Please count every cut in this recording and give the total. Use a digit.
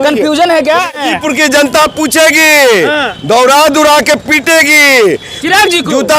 1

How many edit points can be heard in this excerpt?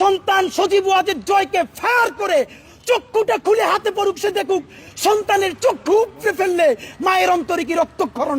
0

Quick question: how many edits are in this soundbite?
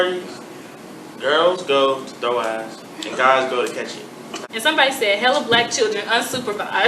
1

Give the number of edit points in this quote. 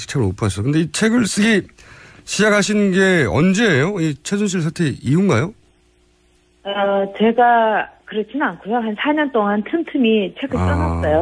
1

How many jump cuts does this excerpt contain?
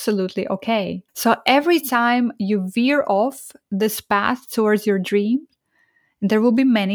1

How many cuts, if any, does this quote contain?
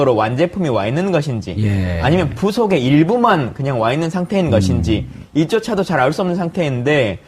1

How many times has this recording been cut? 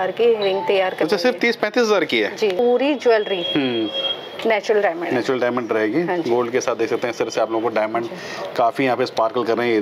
1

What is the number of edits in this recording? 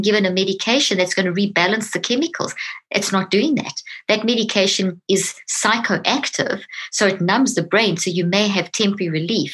1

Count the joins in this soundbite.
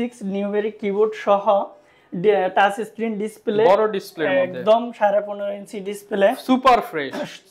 0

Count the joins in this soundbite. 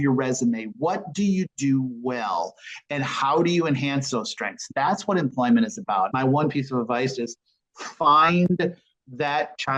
1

